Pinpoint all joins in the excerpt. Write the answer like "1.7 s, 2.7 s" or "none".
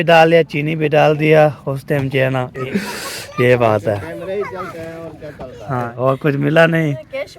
2.7 s, 5.9 s

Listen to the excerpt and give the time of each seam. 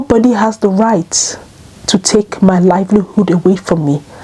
none

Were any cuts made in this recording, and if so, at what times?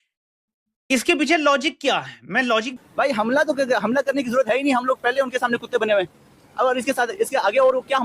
2.7 s

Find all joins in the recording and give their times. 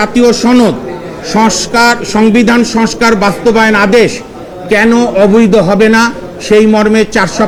none

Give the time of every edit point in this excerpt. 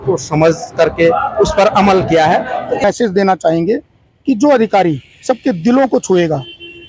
2.8 s

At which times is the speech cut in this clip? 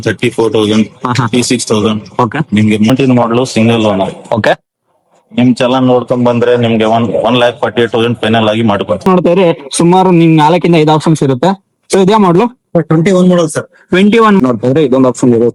2.9 s, 9.1 s, 14.4 s

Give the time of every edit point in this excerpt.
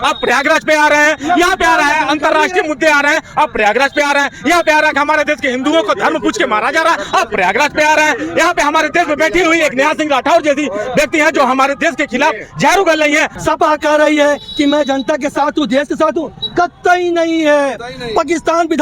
13.3 s

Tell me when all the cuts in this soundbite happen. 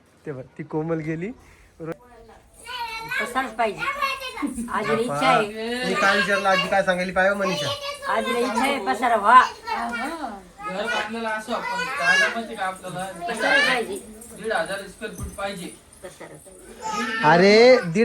1.9 s

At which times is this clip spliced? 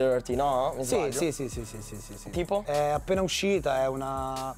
1.2 s

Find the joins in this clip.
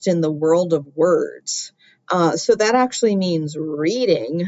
none

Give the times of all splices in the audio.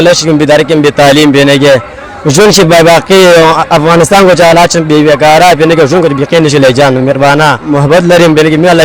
7.6 s

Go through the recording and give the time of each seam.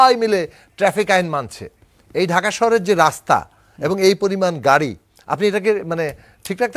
none

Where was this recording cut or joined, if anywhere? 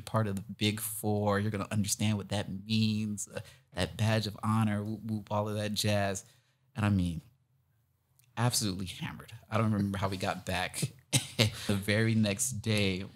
11.7 s

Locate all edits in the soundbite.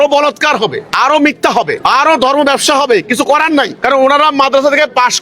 0.8 s, 1.8 s, 3.7 s

